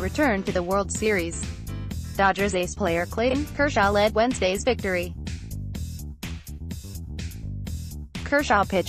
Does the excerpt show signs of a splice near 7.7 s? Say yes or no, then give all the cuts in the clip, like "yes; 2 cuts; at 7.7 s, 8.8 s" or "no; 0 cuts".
yes; 2 cuts; at 5.1 s, 7.7 s